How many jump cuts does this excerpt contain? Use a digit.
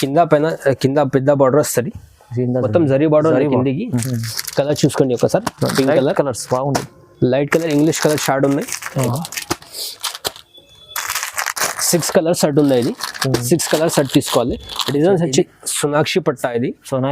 2